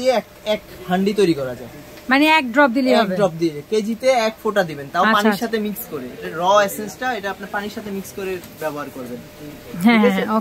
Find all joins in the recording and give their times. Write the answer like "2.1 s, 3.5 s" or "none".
none